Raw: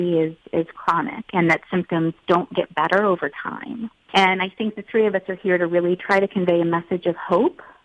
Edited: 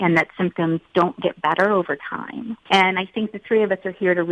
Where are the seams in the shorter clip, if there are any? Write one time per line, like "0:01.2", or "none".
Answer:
0:02.5

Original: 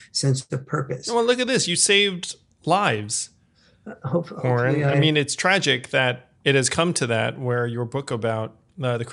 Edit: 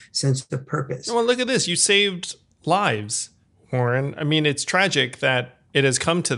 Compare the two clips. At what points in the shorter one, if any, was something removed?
0:03.6

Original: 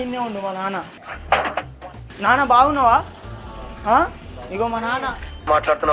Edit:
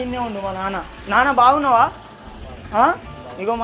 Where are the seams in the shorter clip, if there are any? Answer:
0:00.9

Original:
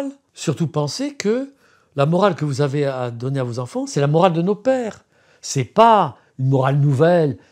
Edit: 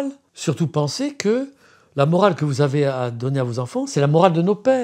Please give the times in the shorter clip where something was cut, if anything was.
none

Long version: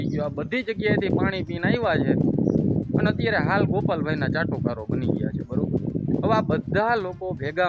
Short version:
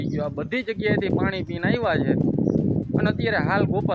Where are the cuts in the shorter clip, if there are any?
none

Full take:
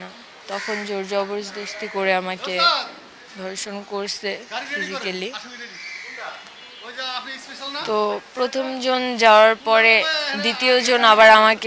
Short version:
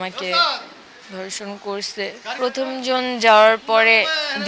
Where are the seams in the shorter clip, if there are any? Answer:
0:02.3

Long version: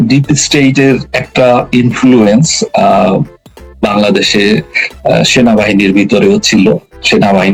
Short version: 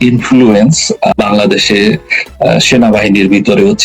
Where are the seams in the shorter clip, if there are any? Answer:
0:01.1

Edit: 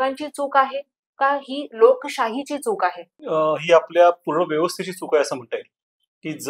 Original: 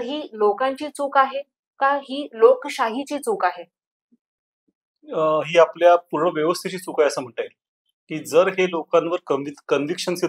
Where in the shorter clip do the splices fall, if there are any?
0:03.1

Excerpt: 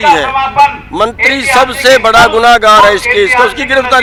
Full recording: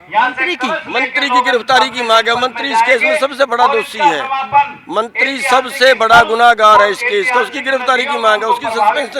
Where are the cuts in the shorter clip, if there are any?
none

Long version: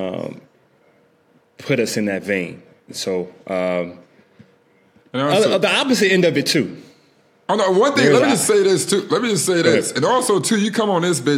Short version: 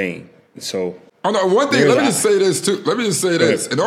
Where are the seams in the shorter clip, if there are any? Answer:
0:01.0

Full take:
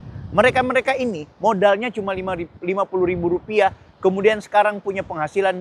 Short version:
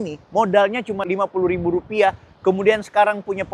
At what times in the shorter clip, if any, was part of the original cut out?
0:01.0

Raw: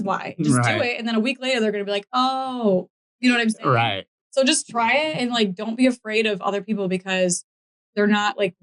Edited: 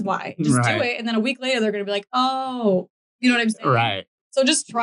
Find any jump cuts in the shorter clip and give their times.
none

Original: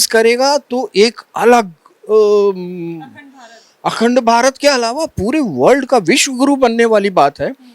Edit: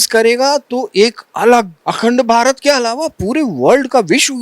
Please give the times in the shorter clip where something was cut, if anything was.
0:01.8

